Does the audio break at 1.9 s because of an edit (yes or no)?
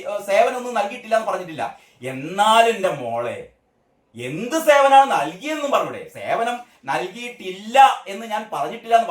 no